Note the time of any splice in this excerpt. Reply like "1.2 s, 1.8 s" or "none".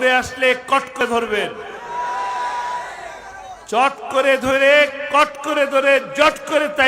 1.0 s

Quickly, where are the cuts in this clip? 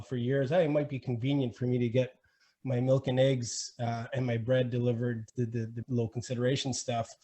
5.7 s

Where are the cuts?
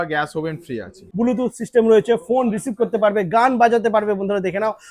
1.0 s

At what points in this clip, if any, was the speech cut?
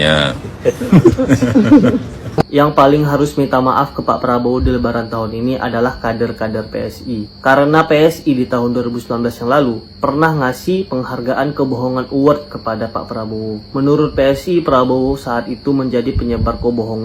2.4 s

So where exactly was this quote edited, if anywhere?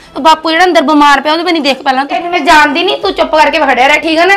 2.2 s

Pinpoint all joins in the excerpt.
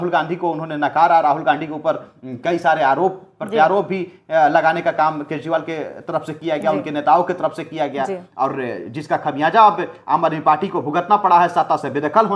none

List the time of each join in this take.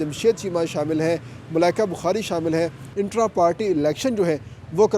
2.8 s

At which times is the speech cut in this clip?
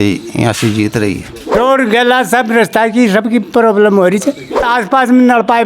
1.5 s, 4.7 s

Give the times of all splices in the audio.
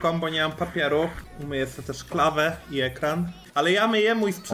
3.5 s

